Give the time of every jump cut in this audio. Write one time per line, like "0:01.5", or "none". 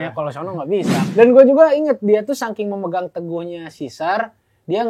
0:01.0